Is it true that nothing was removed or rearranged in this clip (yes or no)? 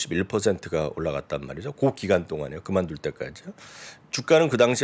yes